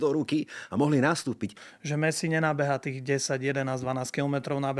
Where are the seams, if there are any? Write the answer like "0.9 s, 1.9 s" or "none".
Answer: 1.6 s